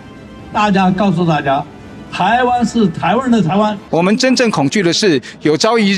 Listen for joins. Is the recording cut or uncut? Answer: cut